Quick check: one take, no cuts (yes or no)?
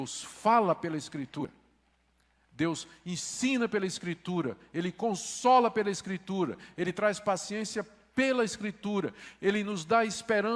no